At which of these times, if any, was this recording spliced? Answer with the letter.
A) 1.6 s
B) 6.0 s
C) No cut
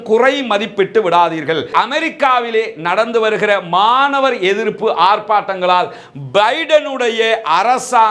A